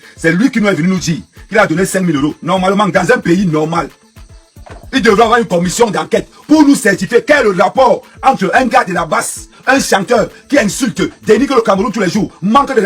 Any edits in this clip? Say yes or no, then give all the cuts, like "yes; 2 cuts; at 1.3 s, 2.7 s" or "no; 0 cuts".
no; 0 cuts